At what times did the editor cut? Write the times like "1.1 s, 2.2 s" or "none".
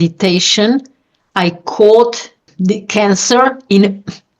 2.5 s